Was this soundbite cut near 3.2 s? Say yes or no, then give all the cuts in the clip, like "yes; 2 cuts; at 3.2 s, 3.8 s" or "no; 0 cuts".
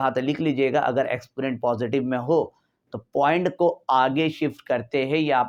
no; 0 cuts